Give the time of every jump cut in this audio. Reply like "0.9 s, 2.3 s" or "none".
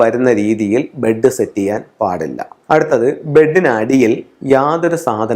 2.5 s